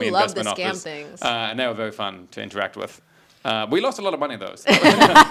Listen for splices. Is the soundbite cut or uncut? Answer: uncut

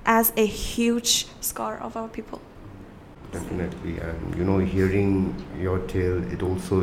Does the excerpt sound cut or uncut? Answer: uncut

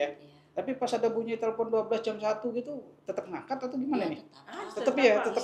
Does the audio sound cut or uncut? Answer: uncut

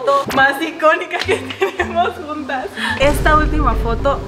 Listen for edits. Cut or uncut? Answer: cut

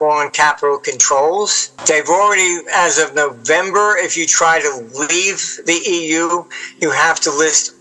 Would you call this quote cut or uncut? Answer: cut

